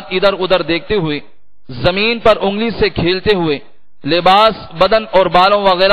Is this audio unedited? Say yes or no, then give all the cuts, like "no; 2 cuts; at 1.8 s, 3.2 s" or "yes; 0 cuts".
yes; 0 cuts